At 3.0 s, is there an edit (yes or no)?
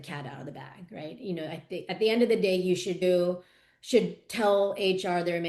yes